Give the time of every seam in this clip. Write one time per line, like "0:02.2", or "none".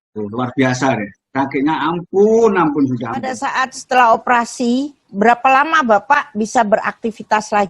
0:03.4